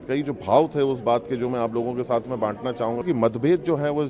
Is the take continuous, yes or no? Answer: no